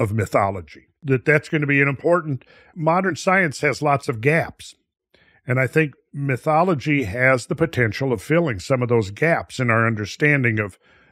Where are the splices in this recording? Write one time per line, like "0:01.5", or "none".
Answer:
0:00.9
0:02.7